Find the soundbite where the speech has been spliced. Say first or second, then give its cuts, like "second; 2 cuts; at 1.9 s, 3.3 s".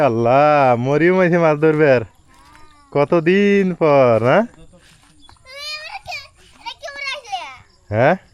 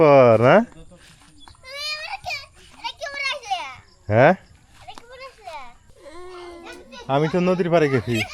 second; 1 cut; at 5.9 s